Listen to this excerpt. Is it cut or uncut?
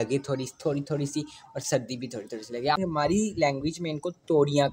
cut